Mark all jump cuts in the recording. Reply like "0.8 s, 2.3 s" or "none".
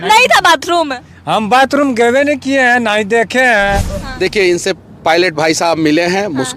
4.0 s